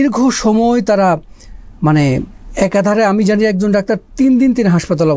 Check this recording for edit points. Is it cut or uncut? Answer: uncut